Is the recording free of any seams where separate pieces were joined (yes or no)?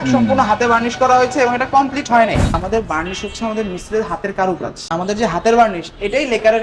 no